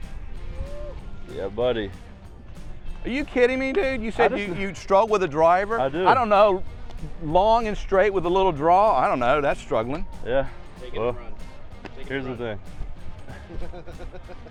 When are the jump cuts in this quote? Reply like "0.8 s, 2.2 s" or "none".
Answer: none